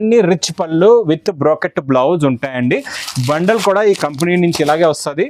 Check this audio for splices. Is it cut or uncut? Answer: uncut